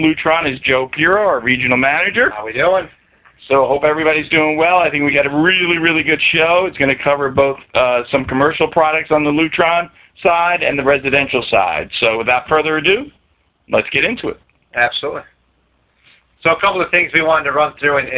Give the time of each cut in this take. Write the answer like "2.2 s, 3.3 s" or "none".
1.3 s